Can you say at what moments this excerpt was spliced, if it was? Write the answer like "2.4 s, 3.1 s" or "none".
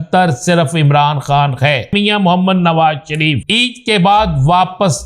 1.9 s, 3.4 s

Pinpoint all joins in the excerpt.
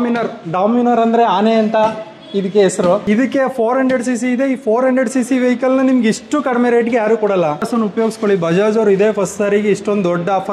3.0 s, 7.6 s

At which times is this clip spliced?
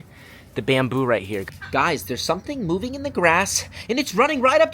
1.5 s

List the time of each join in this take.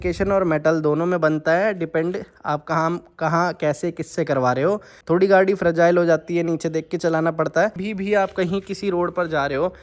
4.9 s, 7.8 s

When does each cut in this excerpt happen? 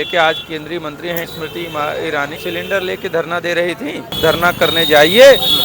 1.2 s, 2.4 s, 4.2 s

